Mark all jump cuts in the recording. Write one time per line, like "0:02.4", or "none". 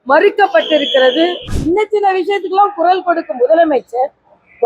0:01.5